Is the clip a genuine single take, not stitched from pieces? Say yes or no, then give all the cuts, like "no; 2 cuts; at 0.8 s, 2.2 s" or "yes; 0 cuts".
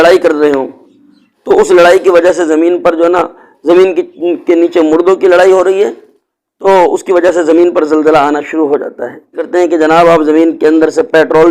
no; 1 cut; at 9.4 s